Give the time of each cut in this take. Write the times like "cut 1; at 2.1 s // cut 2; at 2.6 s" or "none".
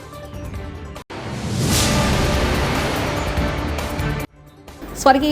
cut 1; at 1.0 s

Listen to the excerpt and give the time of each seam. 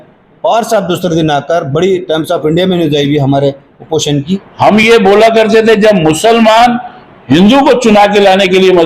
cut 1; at 4.4 s

